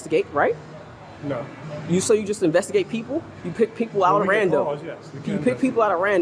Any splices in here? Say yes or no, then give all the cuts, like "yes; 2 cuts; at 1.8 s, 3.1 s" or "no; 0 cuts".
no; 0 cuts